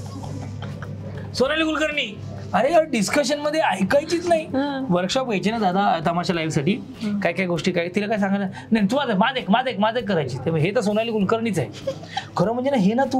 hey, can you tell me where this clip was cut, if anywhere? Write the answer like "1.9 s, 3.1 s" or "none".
none